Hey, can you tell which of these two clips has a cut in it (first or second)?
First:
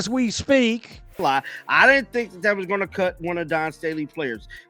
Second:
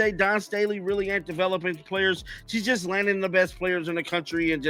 first